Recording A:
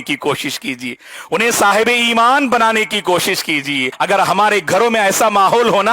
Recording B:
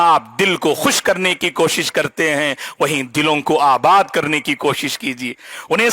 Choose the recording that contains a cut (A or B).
A